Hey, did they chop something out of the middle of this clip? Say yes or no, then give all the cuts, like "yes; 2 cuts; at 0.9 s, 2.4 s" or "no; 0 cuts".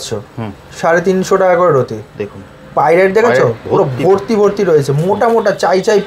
no; 0 cuts